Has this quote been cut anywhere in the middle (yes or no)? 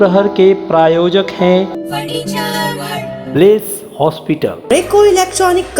yes